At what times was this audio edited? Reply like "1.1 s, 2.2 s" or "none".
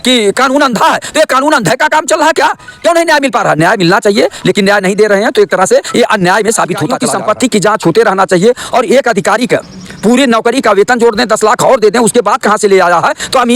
7.0 s